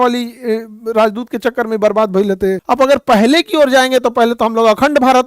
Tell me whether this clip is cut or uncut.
cut